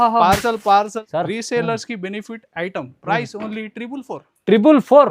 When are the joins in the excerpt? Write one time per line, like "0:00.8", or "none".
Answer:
0:01.0

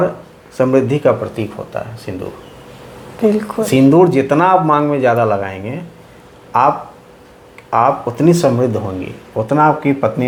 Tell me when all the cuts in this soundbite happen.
none

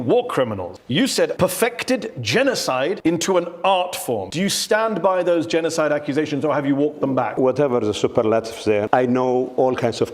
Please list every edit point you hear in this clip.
0:01.1
0:03.0
0:04.3
0:07.3
0:08.9

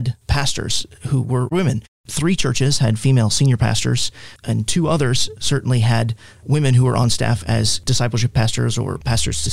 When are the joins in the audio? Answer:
0:07.8

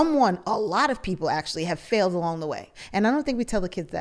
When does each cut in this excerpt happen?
0:02.7

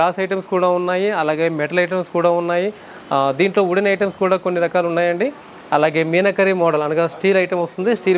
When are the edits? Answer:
none

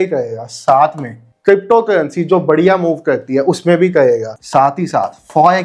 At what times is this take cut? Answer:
0:01.3
0:04.3

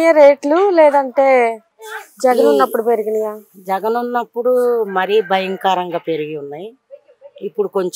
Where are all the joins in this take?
none

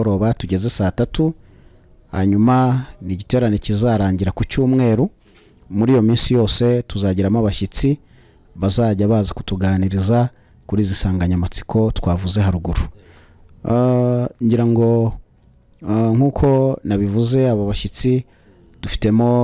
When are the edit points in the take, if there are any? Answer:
none

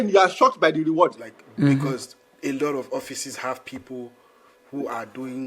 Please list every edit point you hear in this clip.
0:01.3

